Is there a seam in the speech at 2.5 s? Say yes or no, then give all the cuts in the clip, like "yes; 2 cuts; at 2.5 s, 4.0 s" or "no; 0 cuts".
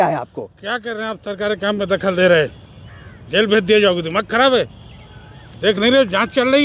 no; 0 cuts